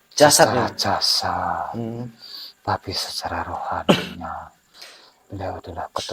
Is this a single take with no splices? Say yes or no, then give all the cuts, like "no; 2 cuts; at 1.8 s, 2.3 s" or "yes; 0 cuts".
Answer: yes; 0 cuts